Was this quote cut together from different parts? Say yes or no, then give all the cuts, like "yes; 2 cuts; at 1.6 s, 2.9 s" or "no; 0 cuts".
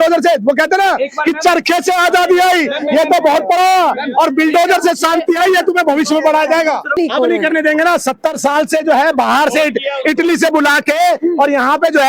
yes; 1 cut; at 7.0 s